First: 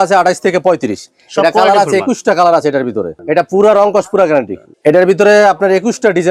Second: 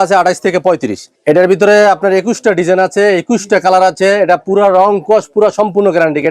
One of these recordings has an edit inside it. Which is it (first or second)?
second